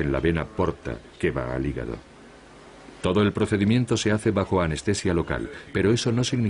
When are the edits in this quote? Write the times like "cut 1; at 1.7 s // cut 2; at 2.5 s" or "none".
cut 1; at 4.2 s